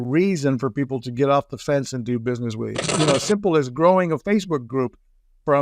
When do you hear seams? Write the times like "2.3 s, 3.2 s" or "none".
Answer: 2.9 s